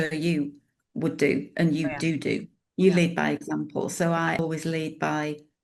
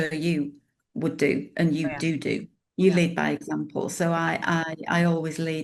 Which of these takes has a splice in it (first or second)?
first